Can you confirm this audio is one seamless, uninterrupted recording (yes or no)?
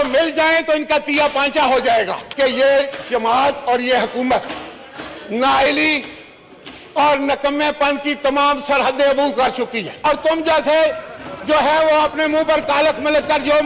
no